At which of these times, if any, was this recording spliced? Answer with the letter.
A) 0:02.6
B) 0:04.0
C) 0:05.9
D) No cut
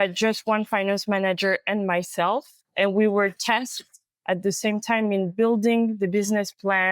A